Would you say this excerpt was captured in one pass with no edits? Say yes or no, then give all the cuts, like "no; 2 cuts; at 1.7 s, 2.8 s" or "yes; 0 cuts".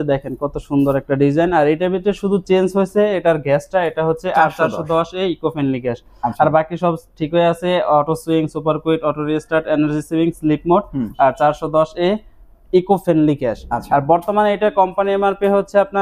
yes; 0 cuts